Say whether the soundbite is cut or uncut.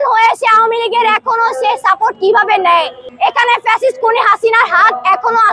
cut